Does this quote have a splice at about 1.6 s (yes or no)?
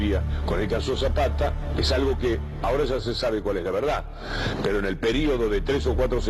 yes